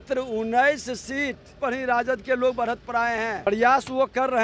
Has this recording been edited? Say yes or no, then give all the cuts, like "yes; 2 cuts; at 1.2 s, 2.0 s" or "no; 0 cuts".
yes; 2 cuts; at 1.5 s, 3.5 s